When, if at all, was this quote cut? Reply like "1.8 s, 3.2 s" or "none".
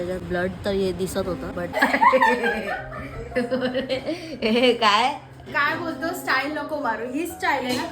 1.7 s